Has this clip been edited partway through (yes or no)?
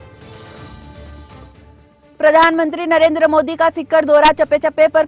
yes